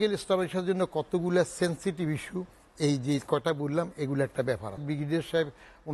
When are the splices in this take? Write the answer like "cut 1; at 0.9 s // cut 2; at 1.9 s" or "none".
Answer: cut 1; at 4.8 s